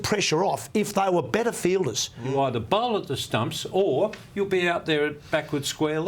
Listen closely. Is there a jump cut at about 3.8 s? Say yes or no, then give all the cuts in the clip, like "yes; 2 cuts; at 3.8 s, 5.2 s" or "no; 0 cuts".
no; 1 cut; at 2.1 s